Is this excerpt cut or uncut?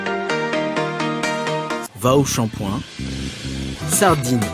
cut